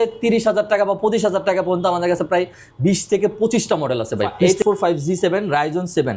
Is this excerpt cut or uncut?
cut